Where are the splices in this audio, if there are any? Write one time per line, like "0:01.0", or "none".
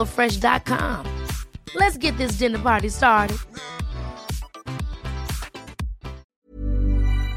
0:06.3